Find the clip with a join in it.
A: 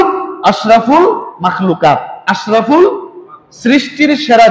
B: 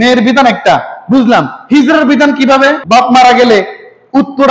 B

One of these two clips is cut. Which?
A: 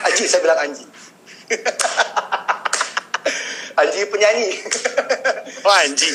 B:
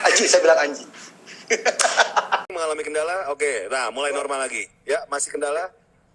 B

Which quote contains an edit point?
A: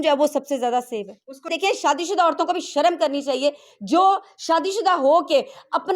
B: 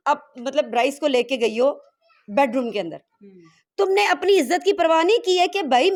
A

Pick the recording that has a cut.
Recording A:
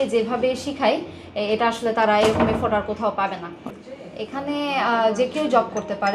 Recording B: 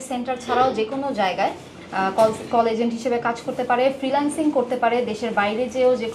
A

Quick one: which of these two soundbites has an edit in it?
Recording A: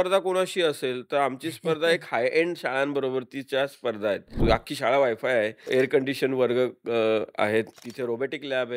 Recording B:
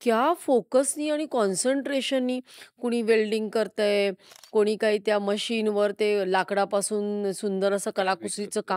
A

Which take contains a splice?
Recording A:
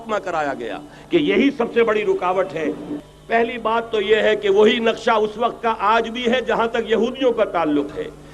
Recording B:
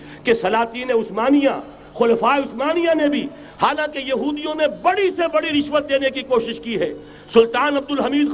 A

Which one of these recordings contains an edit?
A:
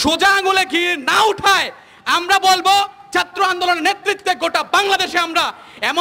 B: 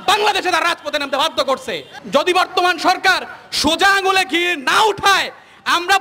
B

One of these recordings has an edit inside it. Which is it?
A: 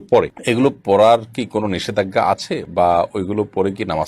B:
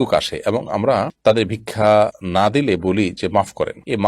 B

